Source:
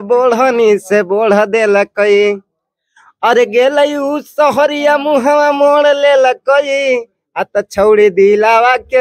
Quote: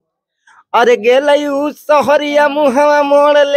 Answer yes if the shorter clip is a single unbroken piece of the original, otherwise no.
yes